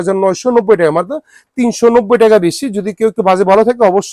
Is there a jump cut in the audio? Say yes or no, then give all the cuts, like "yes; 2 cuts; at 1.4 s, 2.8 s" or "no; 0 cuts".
no; 0 cuts